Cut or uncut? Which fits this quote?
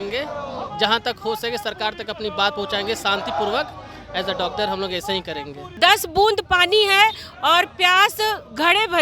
cut